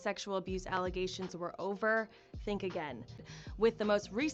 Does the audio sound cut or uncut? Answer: cut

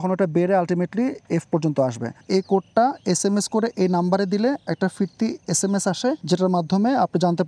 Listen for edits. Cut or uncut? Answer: cut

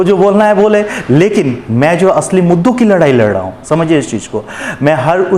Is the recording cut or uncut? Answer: uncut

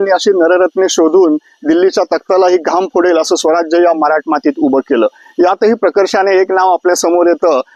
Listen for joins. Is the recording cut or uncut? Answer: uncut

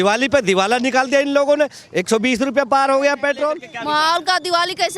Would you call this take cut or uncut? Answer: cut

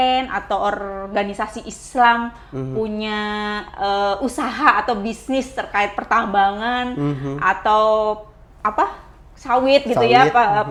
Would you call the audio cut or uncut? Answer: uncut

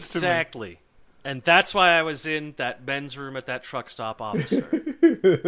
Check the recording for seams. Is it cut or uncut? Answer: cut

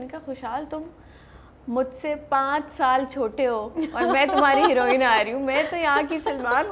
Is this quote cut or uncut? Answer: uncut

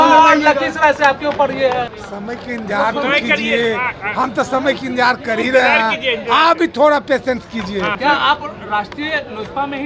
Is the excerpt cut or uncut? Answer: cut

